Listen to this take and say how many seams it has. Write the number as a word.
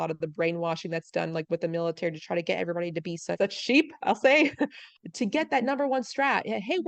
two